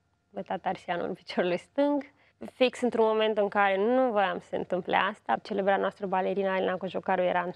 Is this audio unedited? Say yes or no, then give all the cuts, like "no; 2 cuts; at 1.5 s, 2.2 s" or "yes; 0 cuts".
yes; 0 cuts